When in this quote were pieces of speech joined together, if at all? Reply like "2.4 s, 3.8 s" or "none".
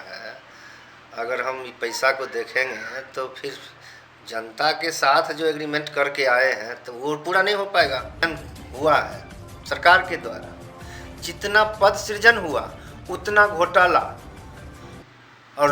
8.2 s

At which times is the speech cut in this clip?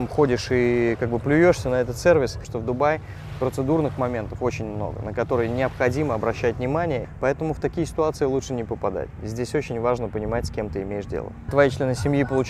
2.5 s, 7.1 s, 11.5 s

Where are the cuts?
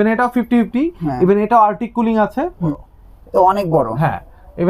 2.7 s

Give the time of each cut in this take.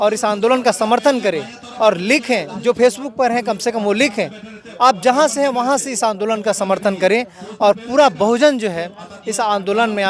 none

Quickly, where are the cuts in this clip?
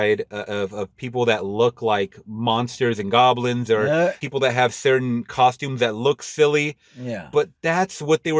4.2 s

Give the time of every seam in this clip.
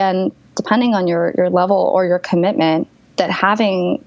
3.0 s

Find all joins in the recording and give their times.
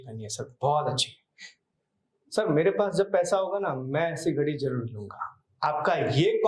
none

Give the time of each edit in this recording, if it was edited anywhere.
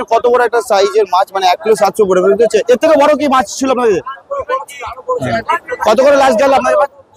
none

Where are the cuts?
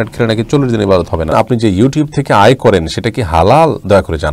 1.3 s

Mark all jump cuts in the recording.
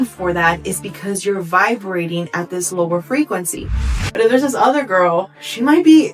3.9 s

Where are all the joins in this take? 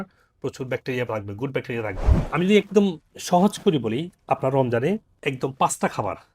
2.1 s

